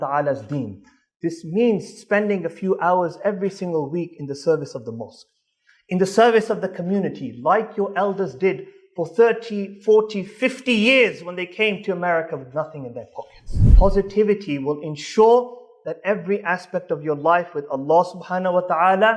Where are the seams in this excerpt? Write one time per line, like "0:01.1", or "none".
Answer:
0:13.7